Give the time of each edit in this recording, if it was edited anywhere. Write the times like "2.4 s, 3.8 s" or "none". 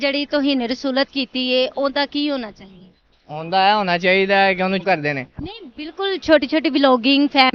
4.8 s

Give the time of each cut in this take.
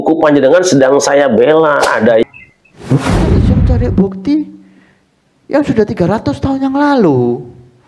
2.2 s

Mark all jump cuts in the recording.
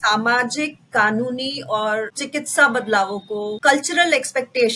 none

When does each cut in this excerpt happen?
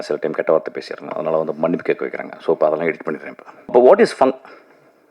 3.7 s

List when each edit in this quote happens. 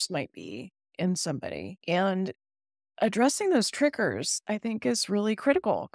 1.7 s

